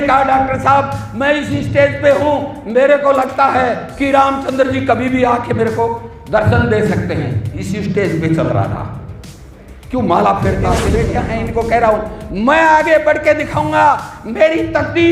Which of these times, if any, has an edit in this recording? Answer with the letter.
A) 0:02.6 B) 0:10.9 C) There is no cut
B